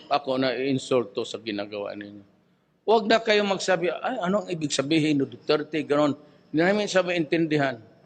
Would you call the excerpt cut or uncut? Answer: cut